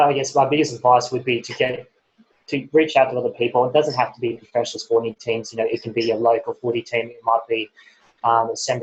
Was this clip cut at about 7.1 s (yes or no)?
no